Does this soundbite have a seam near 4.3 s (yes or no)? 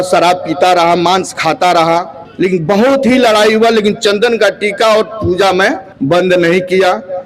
no